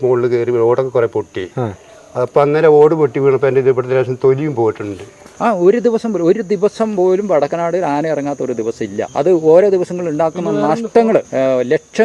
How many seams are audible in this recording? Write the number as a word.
three